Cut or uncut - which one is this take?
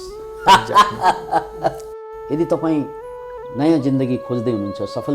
cut